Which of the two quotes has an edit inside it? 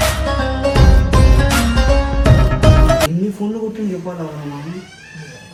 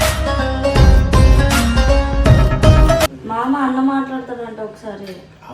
second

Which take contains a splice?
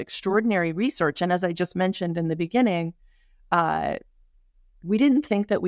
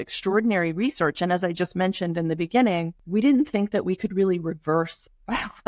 second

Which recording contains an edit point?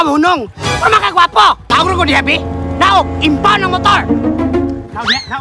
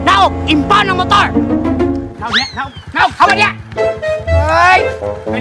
first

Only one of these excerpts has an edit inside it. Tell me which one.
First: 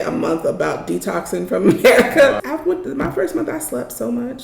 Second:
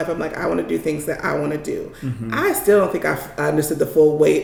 first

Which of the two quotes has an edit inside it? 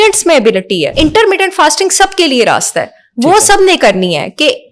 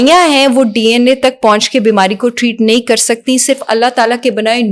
first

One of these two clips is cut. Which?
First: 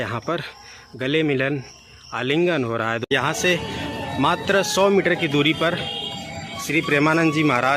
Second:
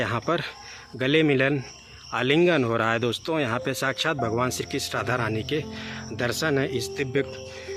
first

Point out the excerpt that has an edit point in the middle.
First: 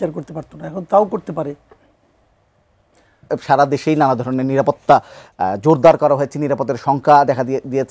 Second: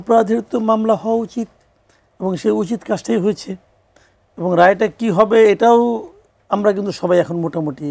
first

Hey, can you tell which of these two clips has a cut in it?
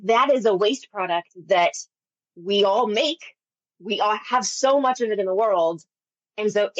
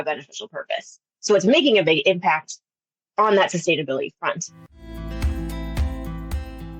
second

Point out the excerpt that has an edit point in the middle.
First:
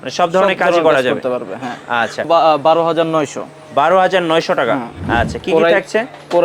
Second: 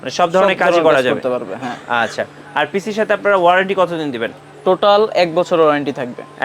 first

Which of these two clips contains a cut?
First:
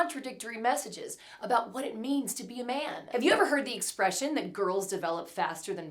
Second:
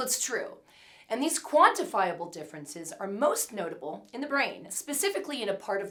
first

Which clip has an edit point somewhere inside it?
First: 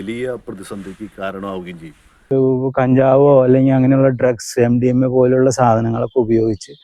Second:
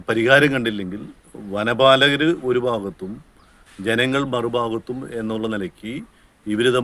first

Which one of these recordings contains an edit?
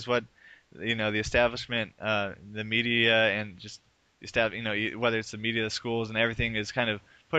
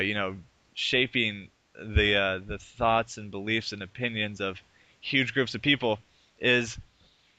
first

